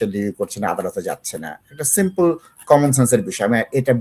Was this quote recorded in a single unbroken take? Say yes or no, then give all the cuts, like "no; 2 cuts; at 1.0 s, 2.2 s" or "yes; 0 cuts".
yes; 0 cuts